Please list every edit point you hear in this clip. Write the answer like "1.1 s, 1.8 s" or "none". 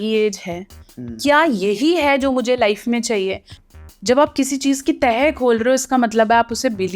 3.5 s